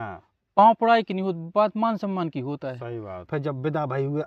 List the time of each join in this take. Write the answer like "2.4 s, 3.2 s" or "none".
3.2 s